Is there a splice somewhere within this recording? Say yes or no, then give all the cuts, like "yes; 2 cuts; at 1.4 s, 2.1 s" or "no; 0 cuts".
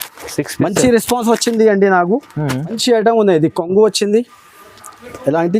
yes; 1 cut; at 2.8 s